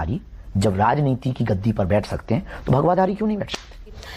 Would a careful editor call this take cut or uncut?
uncut